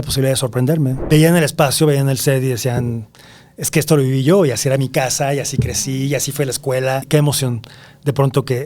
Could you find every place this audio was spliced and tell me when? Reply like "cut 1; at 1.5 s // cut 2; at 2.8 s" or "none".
cut 1; at 1.0 s // cut 2; at 7.0 s